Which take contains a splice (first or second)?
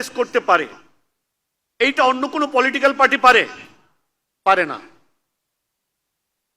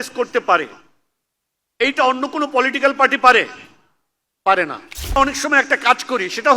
second